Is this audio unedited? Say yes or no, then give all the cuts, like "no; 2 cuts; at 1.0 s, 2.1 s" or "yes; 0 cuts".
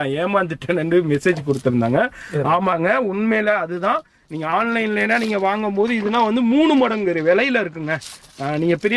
yes; 0 cuts